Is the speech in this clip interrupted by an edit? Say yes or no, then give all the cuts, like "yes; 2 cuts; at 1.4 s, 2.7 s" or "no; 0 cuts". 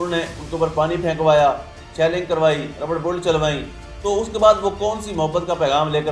no; 0 cuts